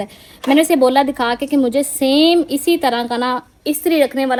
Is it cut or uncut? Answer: uncut